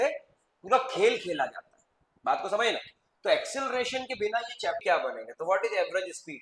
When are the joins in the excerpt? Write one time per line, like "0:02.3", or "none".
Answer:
0:04.8